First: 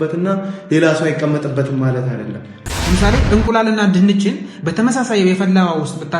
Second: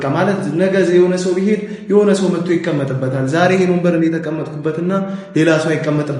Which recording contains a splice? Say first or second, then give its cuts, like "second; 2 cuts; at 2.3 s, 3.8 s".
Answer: first; 1 cut; at 2.5 s